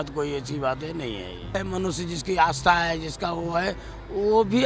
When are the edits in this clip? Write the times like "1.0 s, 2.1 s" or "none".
1.6 s

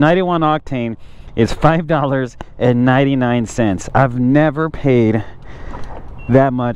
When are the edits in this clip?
none

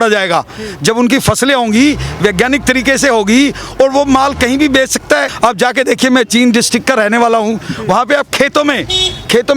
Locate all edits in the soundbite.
5.3 s

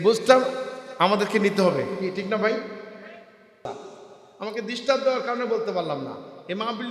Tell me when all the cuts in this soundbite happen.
3.6 s

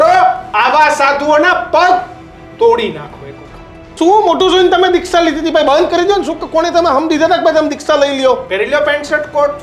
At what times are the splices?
3.9 s

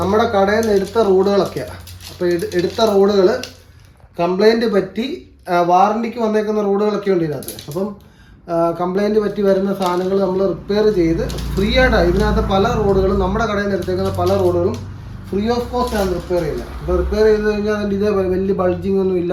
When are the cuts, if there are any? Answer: none

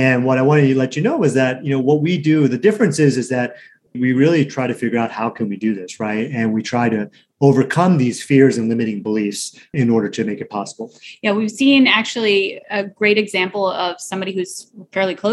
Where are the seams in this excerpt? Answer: none

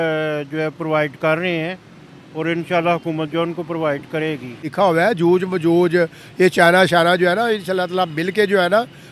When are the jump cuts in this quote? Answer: 4.7 s

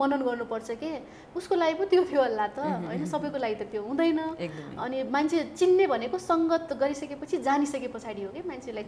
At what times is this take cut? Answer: none

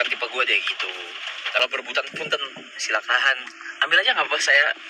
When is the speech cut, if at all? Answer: 1.6 s

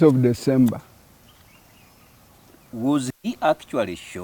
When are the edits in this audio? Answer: none

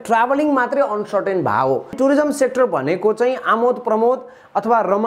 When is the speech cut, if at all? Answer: 1.9 s

